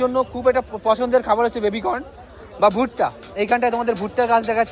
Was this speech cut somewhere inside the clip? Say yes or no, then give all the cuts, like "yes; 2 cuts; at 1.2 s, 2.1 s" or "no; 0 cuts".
no; 0 cuts